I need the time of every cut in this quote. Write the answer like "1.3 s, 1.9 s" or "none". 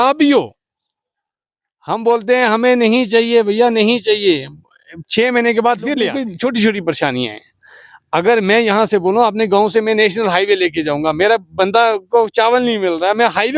6.2 s